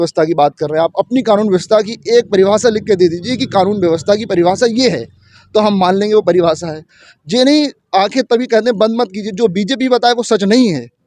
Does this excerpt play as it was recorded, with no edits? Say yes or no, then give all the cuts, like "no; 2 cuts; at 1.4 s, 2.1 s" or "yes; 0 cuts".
yes; 0 cuts